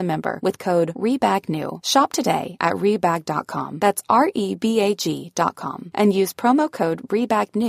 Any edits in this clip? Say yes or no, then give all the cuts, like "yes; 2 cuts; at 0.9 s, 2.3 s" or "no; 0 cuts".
no; 0 cuts